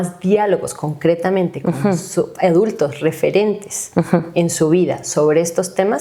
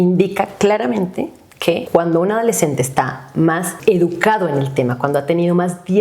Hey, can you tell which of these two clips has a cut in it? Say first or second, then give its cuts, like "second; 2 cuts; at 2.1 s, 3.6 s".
second; 2 cuts; at 1.8 s, 3.7 s